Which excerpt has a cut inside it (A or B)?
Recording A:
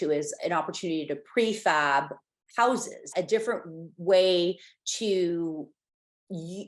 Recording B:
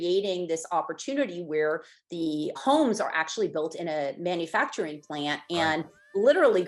A